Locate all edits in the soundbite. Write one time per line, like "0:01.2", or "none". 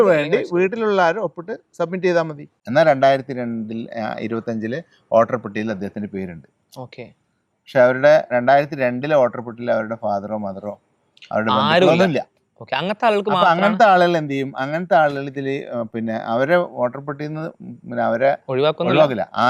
0:02.5